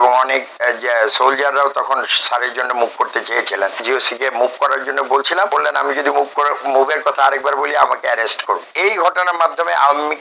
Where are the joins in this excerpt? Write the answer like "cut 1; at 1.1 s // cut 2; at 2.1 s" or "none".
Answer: cut 1; at 3.8 s // cut 2; at 5.5 s // cut 3; at 8.6 s